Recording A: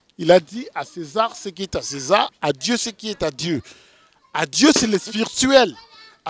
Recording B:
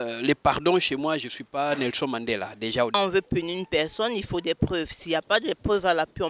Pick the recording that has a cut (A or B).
B